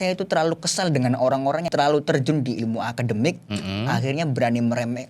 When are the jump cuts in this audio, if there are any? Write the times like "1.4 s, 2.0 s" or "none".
1.7 s